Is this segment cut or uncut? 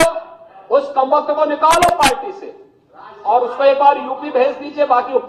uncut